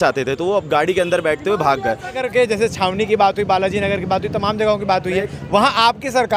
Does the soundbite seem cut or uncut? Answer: cut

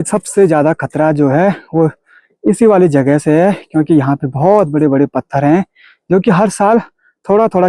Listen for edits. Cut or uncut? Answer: uncut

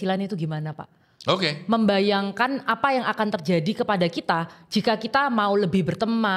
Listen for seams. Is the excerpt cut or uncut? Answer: uncut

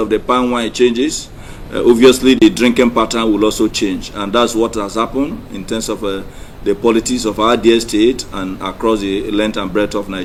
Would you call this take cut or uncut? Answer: uncut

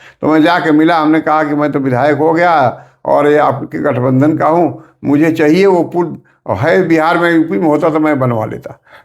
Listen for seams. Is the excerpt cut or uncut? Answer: uncut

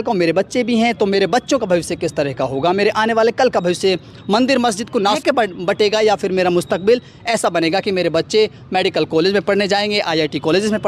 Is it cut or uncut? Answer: cut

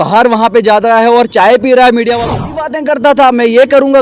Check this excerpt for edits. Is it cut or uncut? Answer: cut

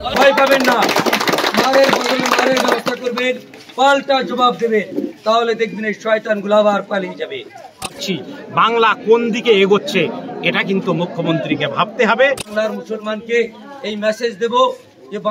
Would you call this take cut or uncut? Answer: cut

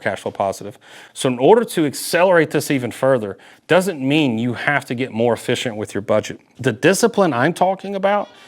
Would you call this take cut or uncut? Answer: cut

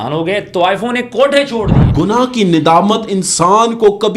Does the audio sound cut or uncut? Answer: cut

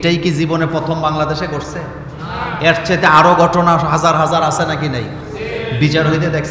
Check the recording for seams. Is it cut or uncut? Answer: uncut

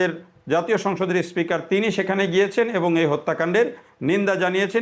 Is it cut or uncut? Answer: uncut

